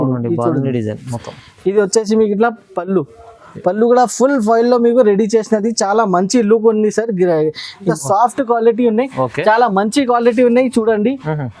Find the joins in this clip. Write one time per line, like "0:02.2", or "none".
0:07.9